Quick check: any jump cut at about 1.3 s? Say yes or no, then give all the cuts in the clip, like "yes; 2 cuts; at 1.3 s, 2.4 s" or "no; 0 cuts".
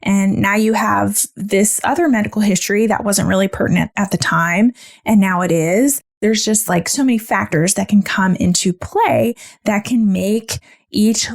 no; 1 cut; at 6.1 s